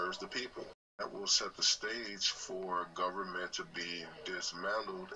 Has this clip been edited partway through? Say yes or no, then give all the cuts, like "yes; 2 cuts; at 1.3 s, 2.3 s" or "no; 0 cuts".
yes; 1 cut; at 1.0 s